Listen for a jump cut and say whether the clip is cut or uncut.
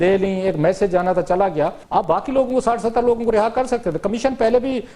cut